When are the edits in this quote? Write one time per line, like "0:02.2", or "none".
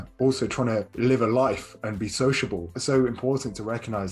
0:00.9
0:02.8